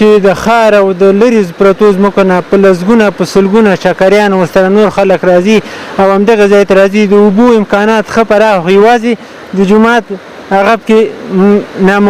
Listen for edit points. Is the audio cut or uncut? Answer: uncut